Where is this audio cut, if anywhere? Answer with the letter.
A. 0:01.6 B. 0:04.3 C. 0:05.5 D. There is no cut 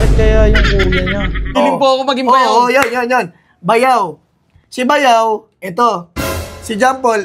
A